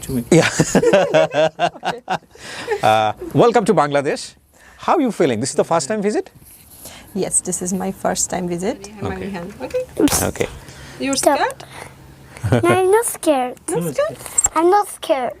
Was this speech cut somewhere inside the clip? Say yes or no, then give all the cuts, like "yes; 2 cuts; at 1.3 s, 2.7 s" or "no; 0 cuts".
yes; 1 cut; at 8.9 s